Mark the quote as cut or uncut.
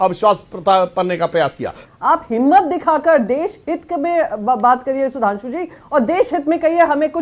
cut